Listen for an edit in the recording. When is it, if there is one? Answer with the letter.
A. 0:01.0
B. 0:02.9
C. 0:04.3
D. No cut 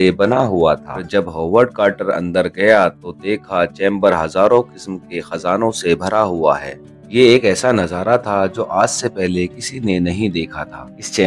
A